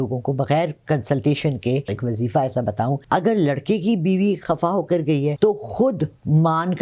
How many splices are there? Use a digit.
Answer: 3